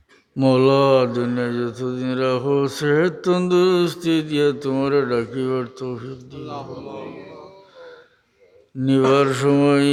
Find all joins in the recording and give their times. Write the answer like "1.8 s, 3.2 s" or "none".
none